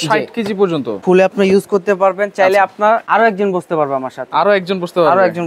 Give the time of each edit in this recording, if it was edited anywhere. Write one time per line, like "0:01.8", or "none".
0:01.0
0:03.0